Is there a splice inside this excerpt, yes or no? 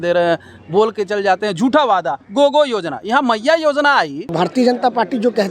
yes